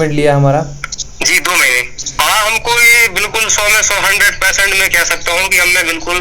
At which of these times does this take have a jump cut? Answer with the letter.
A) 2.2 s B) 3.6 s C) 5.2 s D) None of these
A